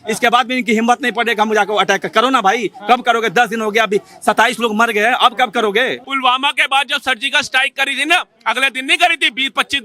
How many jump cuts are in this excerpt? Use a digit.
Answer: 1